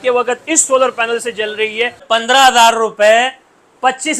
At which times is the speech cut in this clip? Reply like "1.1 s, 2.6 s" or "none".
2.0 s

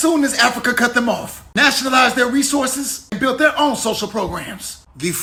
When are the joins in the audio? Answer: none

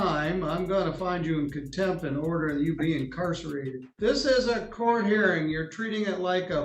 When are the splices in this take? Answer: 3.8 s

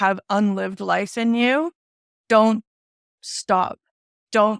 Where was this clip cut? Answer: none

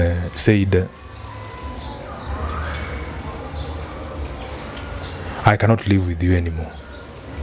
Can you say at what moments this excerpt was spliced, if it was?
none

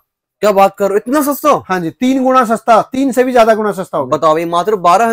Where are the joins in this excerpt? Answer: none

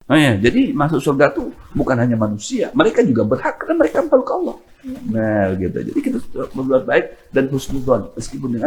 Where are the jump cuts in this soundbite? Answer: none

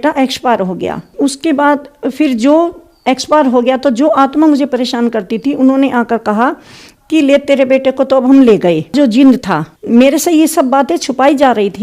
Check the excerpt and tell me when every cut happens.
none

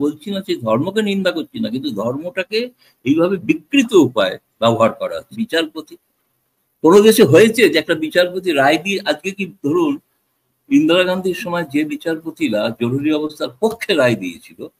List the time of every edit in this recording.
5.3 s

